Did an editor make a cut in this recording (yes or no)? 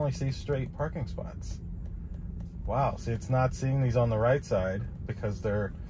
no